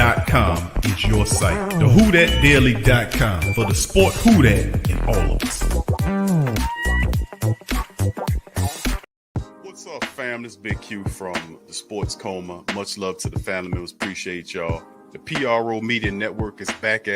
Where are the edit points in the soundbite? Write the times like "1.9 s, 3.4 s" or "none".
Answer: 9.1 s